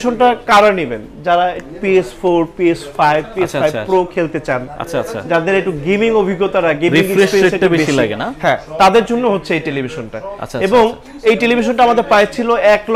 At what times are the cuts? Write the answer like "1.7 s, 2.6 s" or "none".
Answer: none